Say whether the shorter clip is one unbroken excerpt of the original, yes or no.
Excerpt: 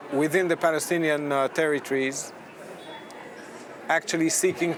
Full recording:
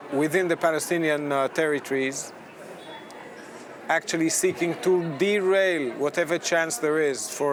yes